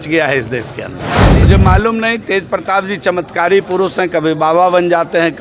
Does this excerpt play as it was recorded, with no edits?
no; 1 cut; at 1.4 s

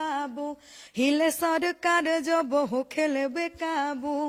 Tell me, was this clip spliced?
no; 0 cuts

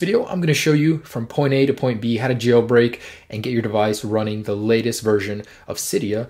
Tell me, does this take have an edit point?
yes; 1 cut; at 3.2 s

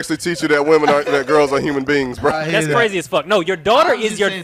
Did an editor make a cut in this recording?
yes; 1 cut; at 2.4 s

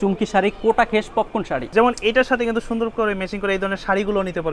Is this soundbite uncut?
no; 1 cut; at 1.6 s

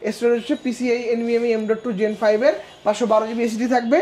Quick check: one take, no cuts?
yes; 0 cuts

